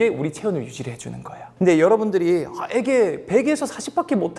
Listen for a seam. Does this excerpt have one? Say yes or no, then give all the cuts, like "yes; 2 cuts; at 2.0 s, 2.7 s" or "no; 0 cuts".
no; 0 cuts